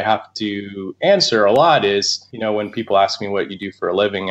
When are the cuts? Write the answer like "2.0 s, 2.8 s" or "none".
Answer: 2.2 s